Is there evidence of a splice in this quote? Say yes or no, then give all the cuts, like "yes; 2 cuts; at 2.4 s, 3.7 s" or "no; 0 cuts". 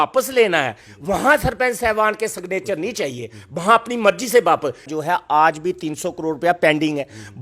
yes; 1 cut; at 4.9 s